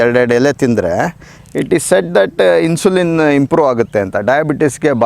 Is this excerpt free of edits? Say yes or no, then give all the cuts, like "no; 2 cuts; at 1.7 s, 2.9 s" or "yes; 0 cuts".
yes; 0 cuts